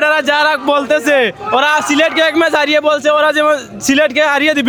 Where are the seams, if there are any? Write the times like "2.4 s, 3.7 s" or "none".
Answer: none